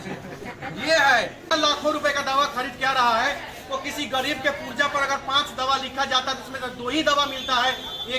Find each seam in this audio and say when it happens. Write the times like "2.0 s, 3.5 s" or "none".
1.5 s

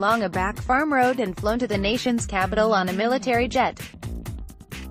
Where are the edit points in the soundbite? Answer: 3.9 s

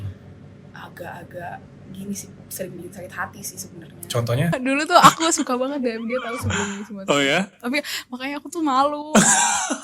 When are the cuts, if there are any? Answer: 4.5 s

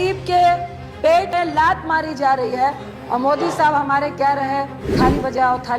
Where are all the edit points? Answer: 1.3 s, 2.9 s, 4.8 s

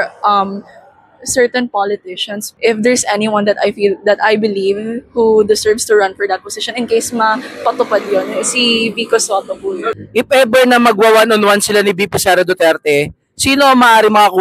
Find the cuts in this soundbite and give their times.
2.4 s, 9.9 s

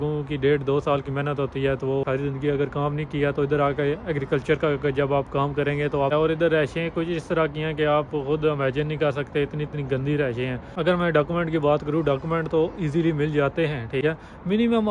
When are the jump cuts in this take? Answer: 2.0 s, 6.1 s, 10.6 s, 14.0 s

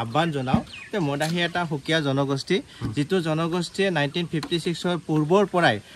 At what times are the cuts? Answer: none

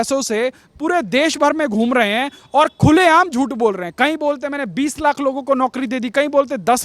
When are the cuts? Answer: none

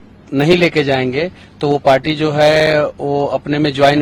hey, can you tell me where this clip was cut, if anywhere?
none

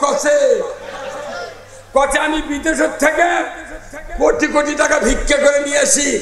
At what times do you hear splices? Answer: none

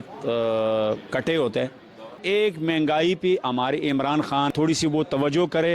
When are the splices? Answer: 2.2 s, 4.5 s

